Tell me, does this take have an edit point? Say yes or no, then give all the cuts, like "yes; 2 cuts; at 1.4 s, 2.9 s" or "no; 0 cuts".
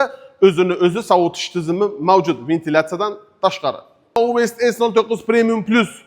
yes; 1 cut; at 4.2 s